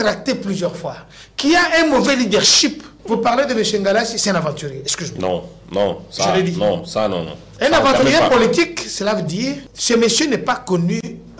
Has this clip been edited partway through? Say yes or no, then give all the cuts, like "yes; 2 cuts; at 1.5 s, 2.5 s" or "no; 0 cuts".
yes; 2 cuts; at 2.9 s, 9.7 s